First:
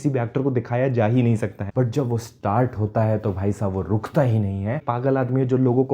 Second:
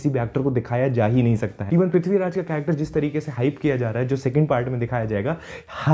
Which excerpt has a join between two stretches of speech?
first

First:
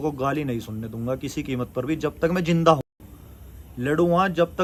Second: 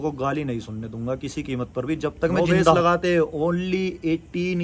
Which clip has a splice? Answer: second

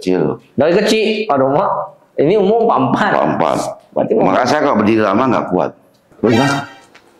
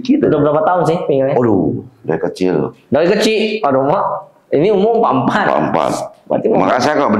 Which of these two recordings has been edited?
first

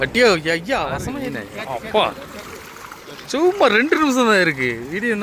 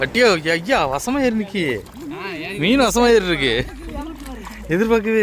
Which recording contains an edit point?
first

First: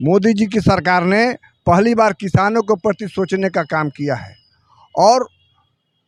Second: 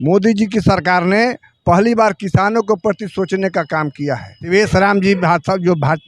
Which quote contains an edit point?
second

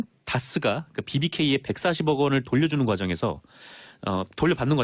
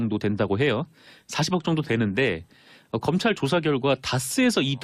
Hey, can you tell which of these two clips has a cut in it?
second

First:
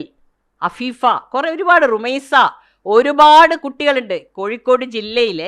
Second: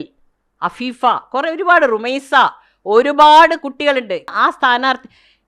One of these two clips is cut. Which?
second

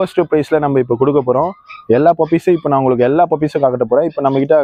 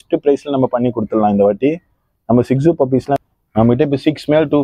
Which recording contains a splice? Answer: second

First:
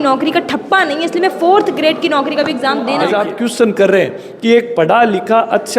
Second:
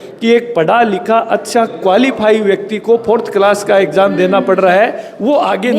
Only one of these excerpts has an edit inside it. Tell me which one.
first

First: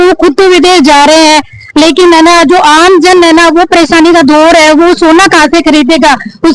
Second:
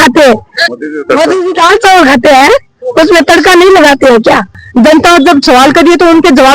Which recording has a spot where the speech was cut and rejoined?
second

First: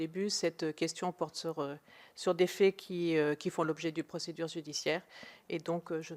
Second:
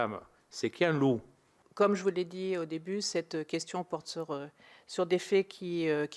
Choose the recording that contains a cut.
second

